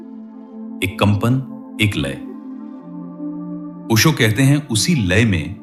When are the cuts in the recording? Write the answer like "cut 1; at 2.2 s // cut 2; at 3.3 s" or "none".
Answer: none